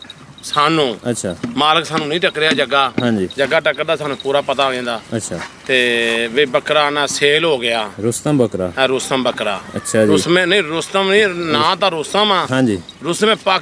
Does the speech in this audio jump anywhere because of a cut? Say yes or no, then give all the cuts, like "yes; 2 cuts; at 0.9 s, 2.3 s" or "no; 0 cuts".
no; 0 cuts